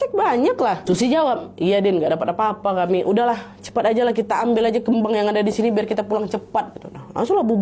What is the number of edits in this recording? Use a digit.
0